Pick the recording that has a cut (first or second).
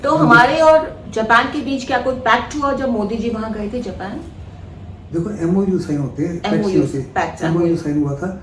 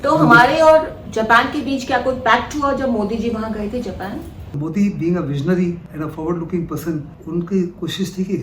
second